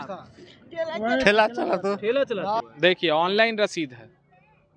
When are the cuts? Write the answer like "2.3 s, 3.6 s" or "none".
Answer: 2.7 s